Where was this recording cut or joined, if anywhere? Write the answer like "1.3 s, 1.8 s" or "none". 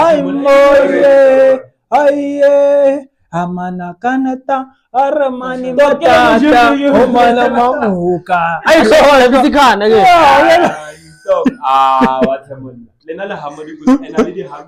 none